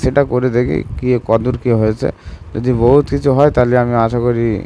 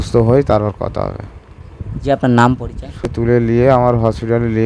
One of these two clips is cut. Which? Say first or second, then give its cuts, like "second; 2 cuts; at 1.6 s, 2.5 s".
second; 1 cut; at 3.1 s